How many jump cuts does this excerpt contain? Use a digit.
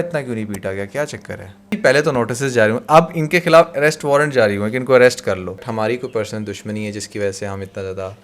2